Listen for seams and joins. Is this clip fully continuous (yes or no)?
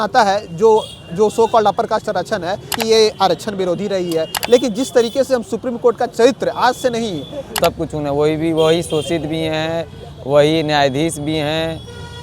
no